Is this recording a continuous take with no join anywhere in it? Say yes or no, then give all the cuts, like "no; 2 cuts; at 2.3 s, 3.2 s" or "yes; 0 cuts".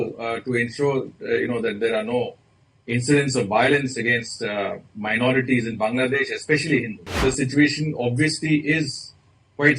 no; 1 cut; at 7.2 s